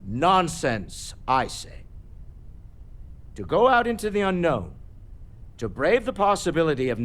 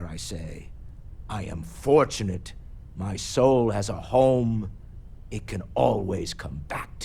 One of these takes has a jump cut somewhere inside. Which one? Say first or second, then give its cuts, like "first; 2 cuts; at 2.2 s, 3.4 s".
first; 2 cuts; at 1.8 s, 3.2 s